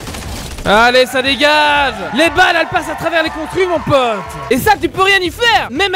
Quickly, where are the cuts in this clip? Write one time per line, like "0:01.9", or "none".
0:04.4